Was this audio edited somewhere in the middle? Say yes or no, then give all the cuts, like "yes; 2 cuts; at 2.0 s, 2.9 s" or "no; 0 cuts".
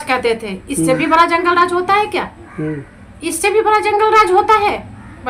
no; 0 cuts